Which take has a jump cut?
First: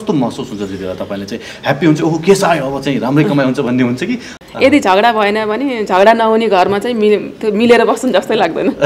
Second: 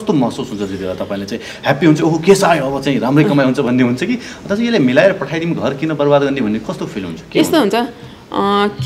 first; 1 cut; at 4.4 s

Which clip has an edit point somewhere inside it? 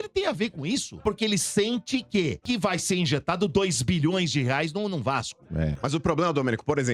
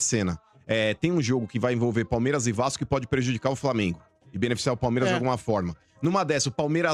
first; 3 cuts; at 1.0 s, 2.4 s, 5.8 s

